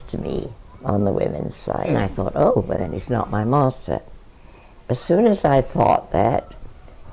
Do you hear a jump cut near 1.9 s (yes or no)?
yes